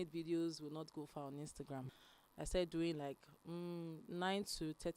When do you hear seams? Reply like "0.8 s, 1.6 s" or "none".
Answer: 1.9 s

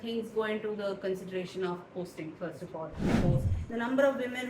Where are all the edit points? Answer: 3.1 s

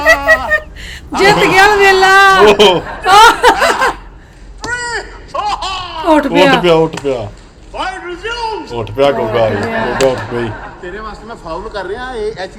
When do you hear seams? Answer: none

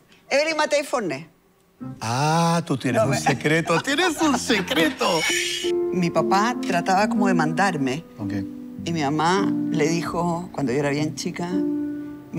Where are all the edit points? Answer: 5.3 s

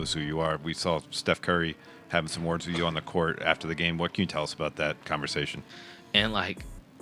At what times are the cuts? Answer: 5.7 s

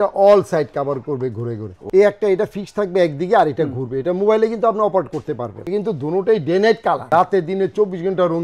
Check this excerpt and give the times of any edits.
1.8 s, 5.6 s, 7.0 s

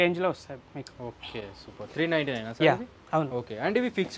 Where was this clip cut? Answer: none

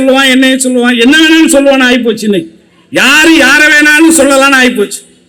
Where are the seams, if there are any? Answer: none

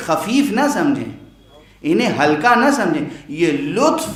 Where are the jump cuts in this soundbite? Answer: none

